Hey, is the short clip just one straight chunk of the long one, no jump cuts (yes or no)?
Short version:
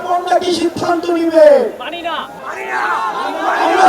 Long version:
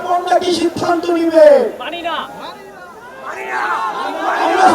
no